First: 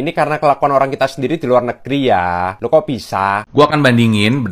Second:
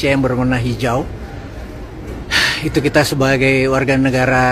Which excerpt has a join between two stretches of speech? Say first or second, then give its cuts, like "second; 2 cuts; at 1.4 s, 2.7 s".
first; 1 cut; at 3.6 s